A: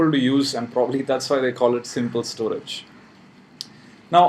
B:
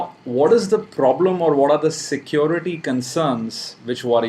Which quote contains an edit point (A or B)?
A